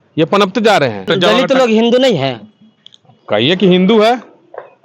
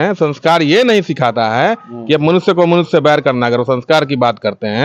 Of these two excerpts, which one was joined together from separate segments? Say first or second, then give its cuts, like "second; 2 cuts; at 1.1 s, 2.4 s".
first; 1 cut; at 1.1 s